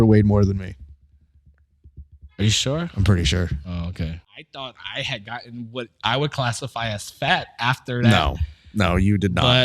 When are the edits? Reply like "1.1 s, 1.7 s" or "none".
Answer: 4.2 s